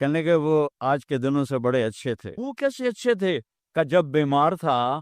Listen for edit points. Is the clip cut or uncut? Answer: cut